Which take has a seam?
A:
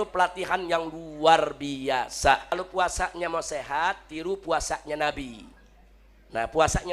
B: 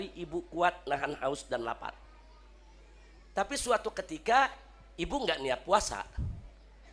A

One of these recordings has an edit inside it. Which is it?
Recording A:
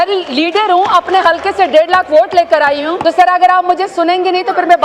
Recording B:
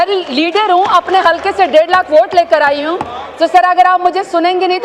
A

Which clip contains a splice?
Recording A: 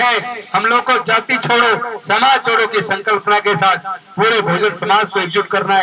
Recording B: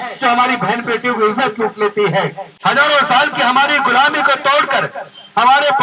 B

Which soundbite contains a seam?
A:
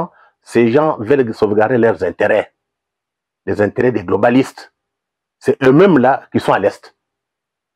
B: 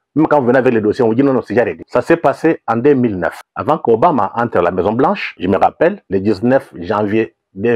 B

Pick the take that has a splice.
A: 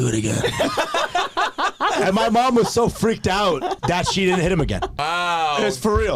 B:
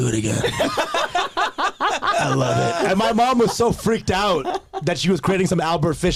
A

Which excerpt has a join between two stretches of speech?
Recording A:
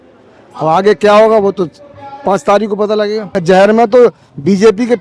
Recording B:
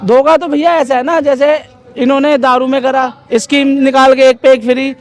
A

